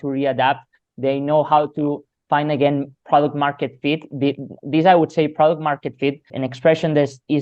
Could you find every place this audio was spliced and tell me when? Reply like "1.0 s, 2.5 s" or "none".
6.3 s